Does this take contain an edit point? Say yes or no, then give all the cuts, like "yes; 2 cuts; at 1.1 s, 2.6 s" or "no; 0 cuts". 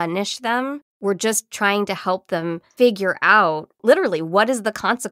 yes; 3 cuts; at 0.9 s, 2.6 s, 3.7 s